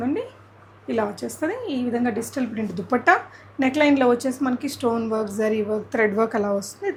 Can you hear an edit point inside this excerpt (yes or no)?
no